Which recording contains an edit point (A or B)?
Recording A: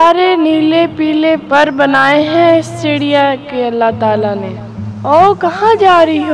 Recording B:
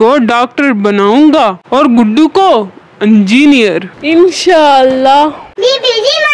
B